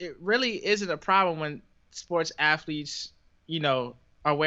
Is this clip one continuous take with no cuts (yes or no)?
yes